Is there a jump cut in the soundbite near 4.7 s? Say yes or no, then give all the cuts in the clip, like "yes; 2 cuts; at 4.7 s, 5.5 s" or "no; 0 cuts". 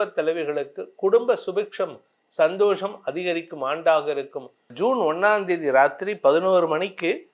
yes; 1 cut; at 4.7 s